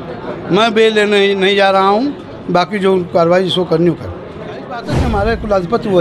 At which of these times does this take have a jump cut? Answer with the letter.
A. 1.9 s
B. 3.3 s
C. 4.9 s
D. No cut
C